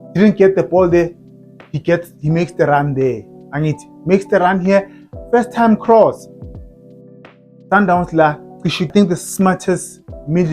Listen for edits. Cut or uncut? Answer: cut